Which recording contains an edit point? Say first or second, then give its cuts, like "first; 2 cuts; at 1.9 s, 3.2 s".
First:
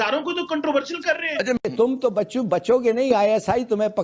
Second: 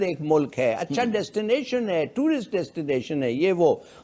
first; 1 cut; at 1.7 s